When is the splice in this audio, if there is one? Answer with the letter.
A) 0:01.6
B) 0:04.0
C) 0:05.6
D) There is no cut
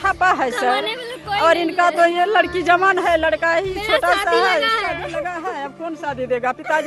D